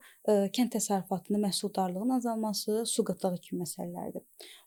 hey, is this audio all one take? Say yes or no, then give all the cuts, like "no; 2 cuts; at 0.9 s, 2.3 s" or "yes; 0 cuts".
yes; 0 cuts